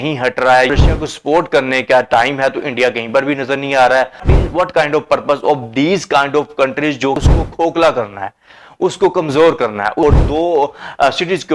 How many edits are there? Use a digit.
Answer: 4